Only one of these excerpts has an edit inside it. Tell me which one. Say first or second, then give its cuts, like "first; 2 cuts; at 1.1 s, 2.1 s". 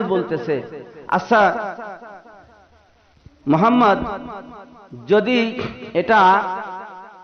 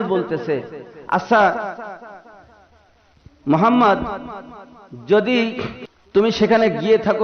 second; 1 cut; at 5.7 s